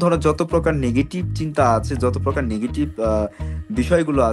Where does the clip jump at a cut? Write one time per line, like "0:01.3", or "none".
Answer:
none